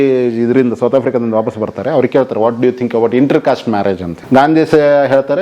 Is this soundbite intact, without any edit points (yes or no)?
no